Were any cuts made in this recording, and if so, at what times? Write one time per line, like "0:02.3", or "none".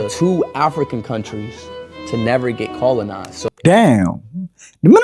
0:03.3